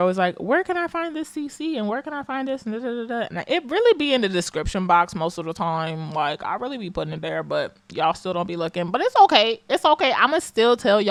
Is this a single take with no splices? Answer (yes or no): yes